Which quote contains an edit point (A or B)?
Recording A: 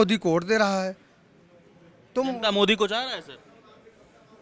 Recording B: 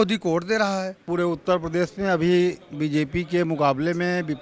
B